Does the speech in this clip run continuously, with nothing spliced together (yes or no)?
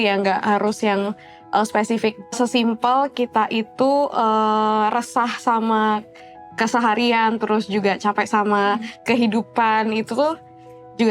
no